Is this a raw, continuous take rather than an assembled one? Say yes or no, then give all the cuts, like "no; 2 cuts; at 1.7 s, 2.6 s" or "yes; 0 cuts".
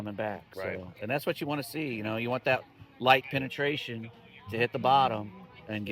yes; 0 cuts